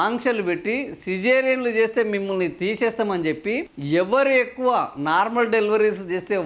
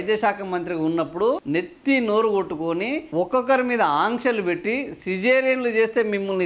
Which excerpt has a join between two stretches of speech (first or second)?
second